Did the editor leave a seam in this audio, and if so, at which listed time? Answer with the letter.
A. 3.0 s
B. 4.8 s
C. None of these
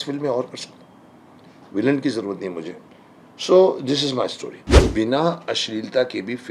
B